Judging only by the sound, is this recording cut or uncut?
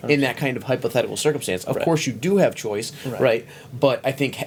uncut